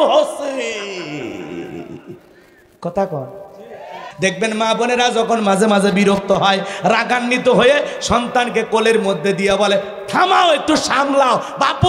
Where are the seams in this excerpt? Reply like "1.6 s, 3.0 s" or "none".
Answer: 4.1 s